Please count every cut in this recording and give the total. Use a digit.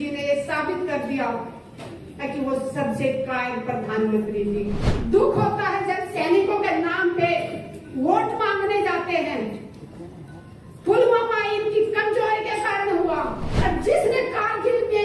2